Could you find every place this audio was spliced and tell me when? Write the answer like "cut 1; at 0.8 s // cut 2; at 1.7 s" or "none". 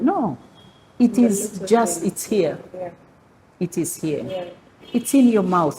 none